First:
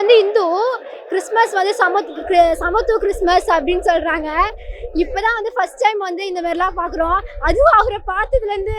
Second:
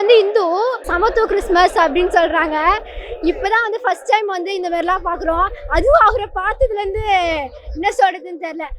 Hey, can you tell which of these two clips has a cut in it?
second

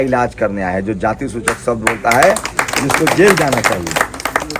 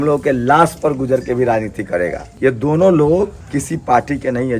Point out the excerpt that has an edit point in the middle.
second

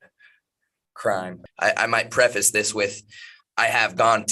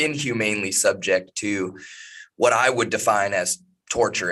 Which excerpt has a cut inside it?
first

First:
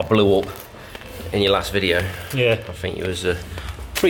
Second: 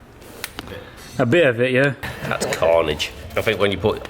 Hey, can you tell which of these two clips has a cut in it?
second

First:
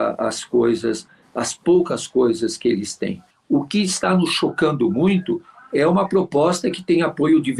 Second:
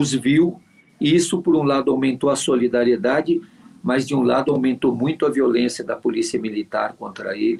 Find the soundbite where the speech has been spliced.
first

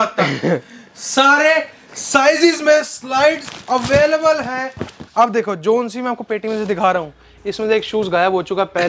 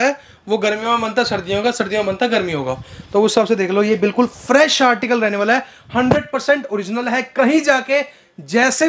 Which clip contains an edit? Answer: first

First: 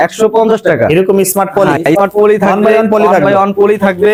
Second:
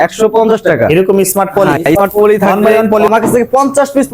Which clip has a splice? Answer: second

